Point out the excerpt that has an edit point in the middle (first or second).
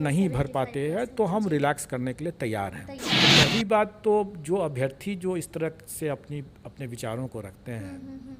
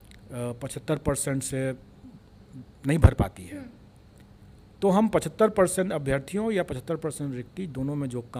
first